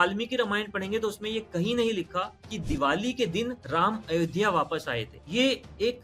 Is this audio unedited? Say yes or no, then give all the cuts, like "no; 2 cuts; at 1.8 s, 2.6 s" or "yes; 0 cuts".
no; 2 cuts; at 3.6 s, 5.1 s